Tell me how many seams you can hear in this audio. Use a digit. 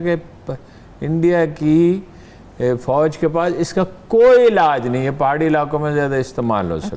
0